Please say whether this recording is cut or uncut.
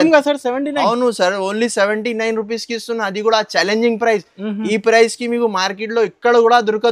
uncut